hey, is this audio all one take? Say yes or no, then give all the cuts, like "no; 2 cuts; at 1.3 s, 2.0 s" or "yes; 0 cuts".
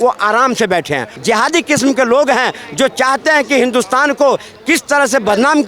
no; 1 cut; at 1.1 s